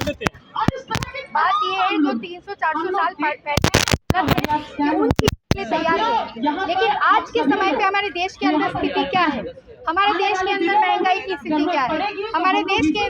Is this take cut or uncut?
cut